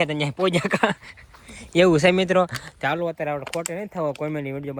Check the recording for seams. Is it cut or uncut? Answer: uncut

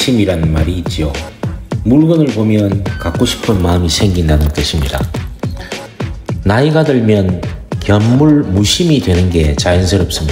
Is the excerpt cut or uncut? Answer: cut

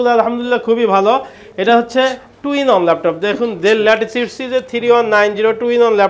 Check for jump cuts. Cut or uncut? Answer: uncut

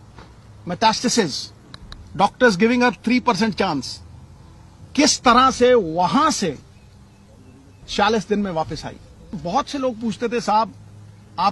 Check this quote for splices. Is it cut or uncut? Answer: cut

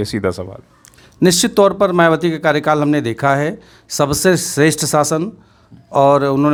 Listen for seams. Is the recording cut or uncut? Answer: uncut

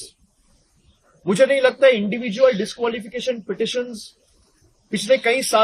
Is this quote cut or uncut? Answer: uncut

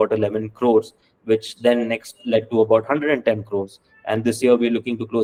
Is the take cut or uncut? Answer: uncut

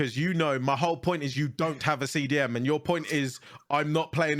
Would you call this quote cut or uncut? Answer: uncut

